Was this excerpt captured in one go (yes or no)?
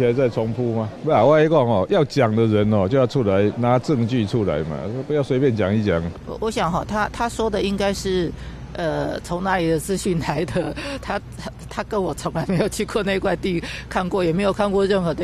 no